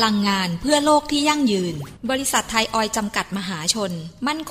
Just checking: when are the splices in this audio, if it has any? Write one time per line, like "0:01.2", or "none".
0:01.9